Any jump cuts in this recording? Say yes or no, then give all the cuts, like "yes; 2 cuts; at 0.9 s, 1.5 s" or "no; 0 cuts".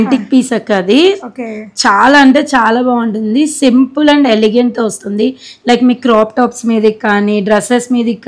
no; 0 cuts